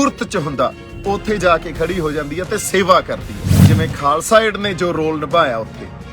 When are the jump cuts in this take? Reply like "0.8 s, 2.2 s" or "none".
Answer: 3.6 s